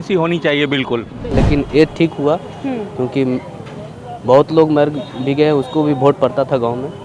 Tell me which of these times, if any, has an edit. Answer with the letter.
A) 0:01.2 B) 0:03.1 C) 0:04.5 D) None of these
A